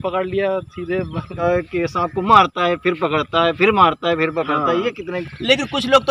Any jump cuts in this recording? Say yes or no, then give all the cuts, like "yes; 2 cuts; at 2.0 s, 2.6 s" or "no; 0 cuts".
yes; 2 cuts; at 1.4 s, 5.1 s